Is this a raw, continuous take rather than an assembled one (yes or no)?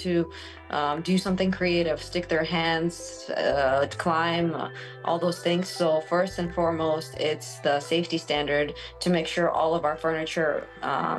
yes